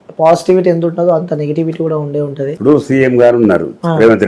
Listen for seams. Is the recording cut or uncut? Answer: cut